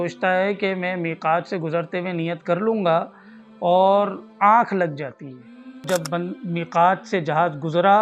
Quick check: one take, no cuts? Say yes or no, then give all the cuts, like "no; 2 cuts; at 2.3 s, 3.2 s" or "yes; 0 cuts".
no; 1 cut; at 5.8 s